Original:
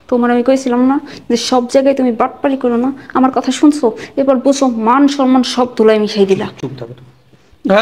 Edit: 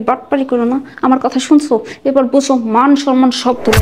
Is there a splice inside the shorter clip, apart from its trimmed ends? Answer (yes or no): no